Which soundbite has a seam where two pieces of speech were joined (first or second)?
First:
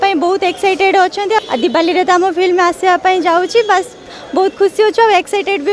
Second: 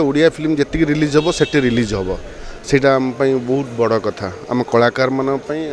first